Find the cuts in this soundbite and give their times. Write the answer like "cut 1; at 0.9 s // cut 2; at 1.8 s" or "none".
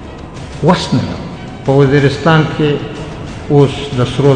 cut 1; at 1.5 s